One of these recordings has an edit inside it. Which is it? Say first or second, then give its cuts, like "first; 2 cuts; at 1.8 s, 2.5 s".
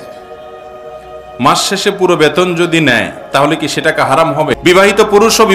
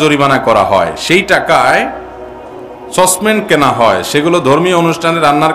first; 1 cut; at 4.6 s